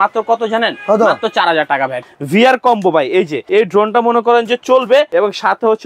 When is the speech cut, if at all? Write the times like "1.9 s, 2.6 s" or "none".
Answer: 2.0 s, 3.4 s, 5.1 s